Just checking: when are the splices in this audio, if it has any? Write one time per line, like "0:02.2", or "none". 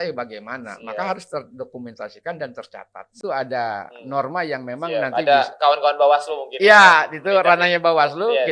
0:03.2

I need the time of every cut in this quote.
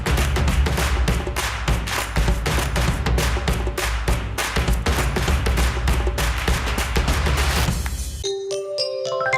0:08.0

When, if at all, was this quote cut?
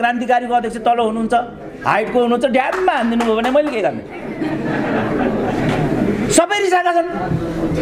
none

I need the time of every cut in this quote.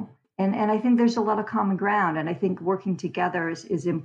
none

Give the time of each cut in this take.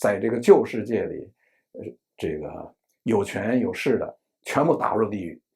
none

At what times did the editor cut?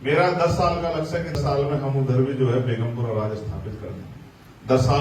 0:01.4

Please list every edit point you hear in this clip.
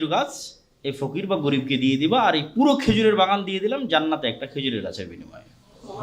none

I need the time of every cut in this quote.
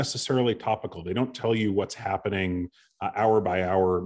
none

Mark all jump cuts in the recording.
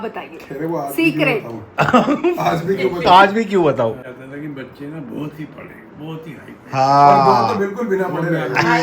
0:04.0

